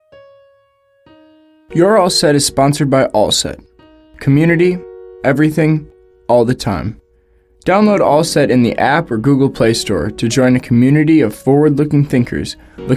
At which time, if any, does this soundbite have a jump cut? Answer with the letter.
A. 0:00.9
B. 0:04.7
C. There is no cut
A